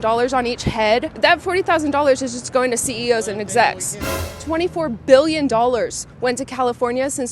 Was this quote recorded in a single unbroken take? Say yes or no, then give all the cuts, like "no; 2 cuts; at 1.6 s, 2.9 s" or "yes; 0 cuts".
no; 2 cuts; at 1.1 s, 4.2 s